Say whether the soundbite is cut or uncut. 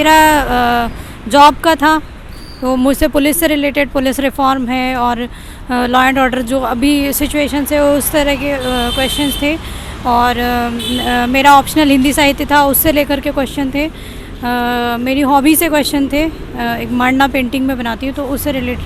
uncut